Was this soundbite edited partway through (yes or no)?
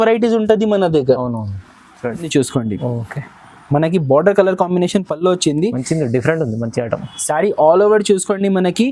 yes